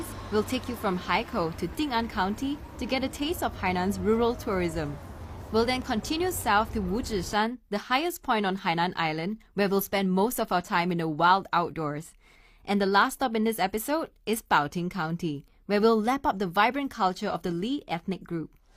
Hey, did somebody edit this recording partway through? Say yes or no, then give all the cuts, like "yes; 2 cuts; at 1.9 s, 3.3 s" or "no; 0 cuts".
yes; 1 cut; at 12.1 s